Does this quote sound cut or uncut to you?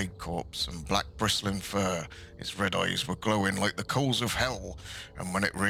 uncut